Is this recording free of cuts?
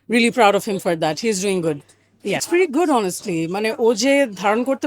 no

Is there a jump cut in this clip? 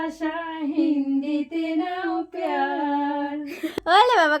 no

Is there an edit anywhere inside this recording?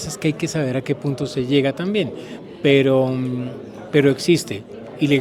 no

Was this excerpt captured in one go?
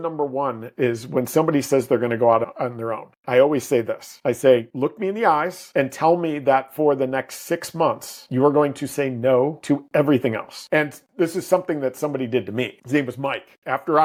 yes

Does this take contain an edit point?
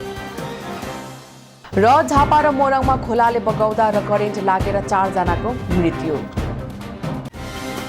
no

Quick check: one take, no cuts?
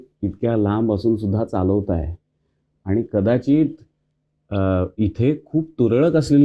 yes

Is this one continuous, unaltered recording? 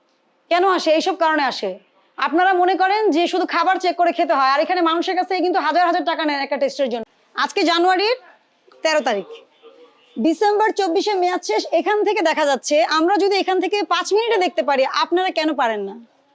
no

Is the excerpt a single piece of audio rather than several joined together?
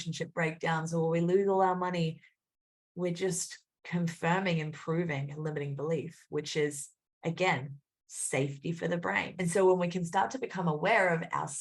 no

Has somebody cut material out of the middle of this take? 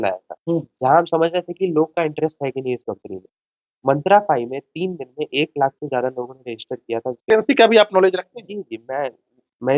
yes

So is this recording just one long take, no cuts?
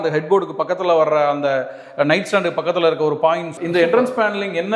no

